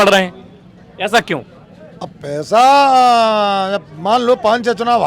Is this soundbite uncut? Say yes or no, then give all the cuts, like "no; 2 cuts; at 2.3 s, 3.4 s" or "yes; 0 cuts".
yes; 0 cuts